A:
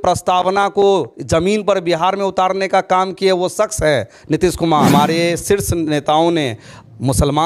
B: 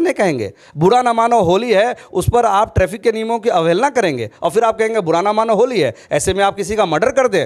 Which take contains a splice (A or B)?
A